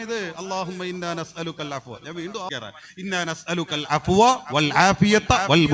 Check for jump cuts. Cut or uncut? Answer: cut